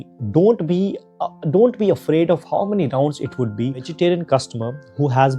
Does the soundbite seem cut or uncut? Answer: cut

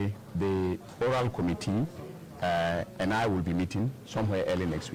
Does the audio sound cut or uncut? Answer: uncut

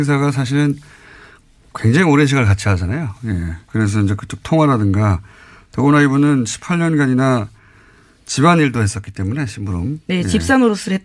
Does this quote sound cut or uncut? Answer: uncut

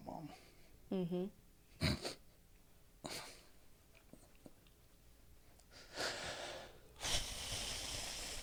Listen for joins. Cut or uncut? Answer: uncut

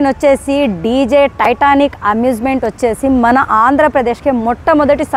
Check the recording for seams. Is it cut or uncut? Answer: uncut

